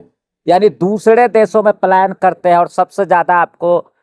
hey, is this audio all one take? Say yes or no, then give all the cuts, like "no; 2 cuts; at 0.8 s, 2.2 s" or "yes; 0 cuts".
yes; 0 cuts